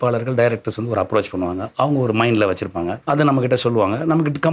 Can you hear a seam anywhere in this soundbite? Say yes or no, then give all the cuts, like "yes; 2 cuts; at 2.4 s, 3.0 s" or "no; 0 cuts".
yes; 1 cut; at 3.0 s